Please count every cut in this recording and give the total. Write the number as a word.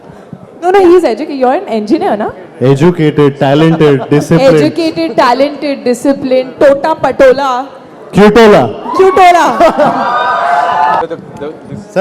one